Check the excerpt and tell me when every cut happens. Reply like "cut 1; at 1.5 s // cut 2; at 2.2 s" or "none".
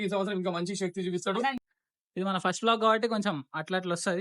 cut 1; at 1.6 s